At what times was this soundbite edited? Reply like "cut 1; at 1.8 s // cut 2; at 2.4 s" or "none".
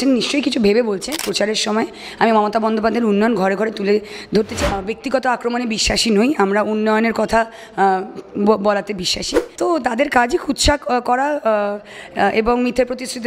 cut 1; at 1.3 s // cut 2; at 4.8 s // cut 3; at 9.4 s